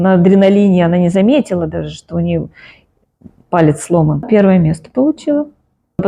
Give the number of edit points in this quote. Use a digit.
0